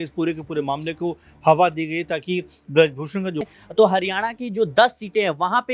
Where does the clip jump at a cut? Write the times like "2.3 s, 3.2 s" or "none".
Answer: 3.4 s